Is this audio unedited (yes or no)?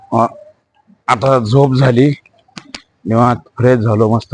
yes